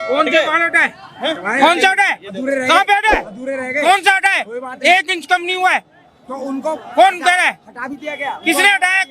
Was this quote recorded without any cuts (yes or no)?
yes